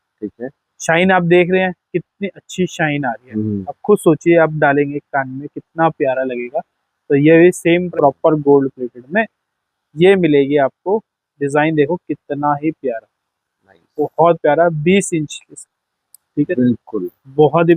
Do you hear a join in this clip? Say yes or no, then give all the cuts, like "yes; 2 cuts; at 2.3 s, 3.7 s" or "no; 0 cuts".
yes; 2 cuts; at 7.9 s, 15.5 s